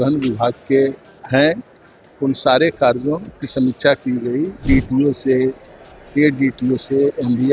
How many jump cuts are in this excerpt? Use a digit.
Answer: 2